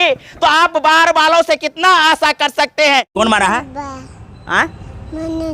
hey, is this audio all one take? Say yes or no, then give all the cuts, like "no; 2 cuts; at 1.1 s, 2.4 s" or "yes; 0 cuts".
no; 1 cut; at 3.1 s